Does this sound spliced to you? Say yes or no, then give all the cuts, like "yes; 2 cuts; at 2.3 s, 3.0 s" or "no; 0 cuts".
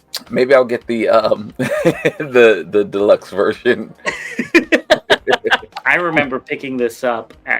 yes; 1 cut; at 5.7 s